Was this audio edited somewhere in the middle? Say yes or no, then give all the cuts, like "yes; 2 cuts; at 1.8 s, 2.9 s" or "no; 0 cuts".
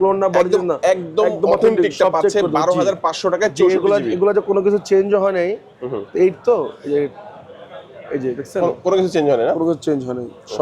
no; 0 cuts